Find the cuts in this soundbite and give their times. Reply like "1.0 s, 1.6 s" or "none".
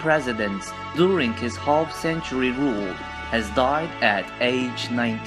none